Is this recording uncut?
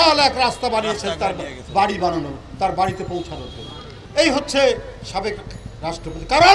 yes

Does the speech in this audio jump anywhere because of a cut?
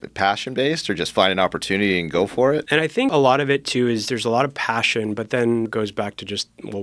yes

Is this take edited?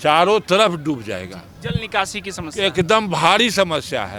no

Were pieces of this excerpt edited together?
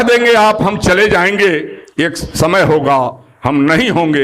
no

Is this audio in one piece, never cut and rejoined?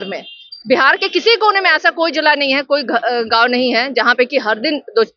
yes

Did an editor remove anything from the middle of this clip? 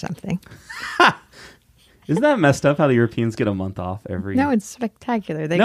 no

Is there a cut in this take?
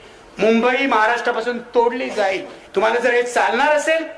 yes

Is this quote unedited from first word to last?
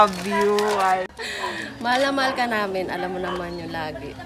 no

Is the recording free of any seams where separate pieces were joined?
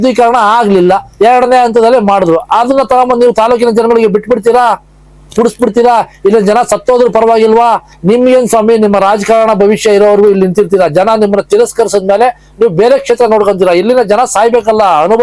yes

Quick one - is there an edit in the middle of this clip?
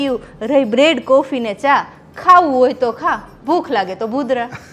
no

